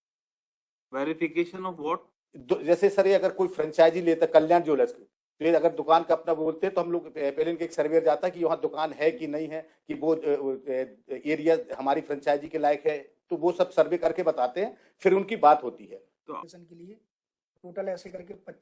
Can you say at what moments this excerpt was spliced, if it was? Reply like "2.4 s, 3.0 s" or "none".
16.4 s